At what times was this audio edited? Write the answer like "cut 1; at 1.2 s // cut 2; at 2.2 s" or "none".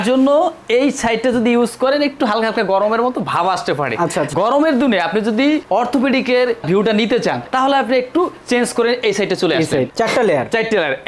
cut 1; at 9.9 s

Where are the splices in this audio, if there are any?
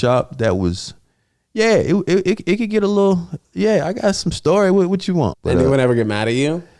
cut 1; at 5.3 s

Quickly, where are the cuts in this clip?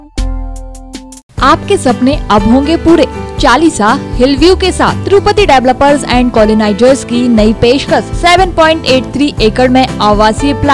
none

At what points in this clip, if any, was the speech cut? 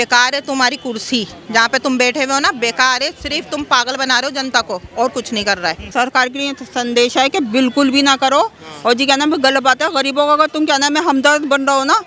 cut 1; at 5.8 s

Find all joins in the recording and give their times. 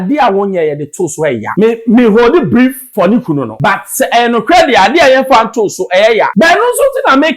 cut 1; at 1.5 s // cut 2; at 2.8 s // cut 3; at 3.5 s // cut 4; at 6.3 s

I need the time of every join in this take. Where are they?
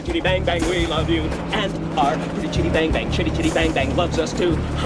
none

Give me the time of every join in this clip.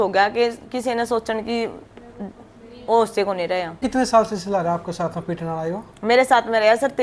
cut 1; at 3.8 s

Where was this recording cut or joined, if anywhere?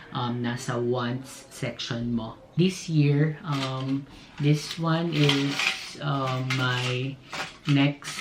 cut 1; at 2.5 s

